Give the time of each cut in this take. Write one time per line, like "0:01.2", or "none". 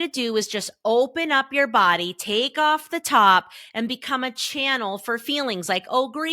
none